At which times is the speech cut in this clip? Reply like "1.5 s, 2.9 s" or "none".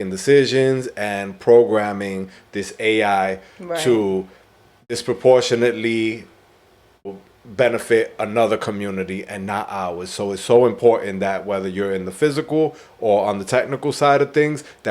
4.8 s, 7.1 s